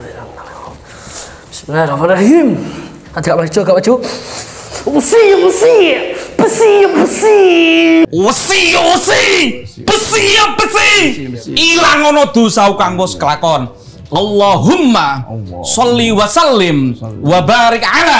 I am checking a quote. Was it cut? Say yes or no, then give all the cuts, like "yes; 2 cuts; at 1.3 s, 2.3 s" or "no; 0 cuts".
yes; 1 cut; at 8.1 s